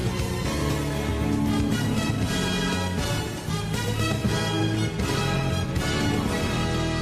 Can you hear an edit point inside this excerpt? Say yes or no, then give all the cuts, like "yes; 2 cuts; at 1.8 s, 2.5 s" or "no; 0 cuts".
yes; 1 cut; at 5.5 s